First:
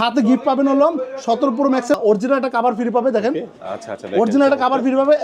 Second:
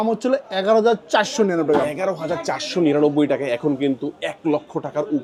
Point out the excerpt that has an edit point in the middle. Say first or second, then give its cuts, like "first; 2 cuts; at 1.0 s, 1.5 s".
first; 1 cut; at 2.0 s